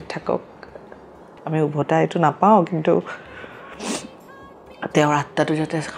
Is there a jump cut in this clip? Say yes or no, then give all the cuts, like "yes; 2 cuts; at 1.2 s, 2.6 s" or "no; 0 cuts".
no; 0 cuts